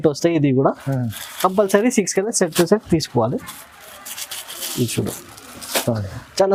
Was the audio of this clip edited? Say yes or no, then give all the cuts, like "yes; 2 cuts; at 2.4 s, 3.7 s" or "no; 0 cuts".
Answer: no; 0 cuts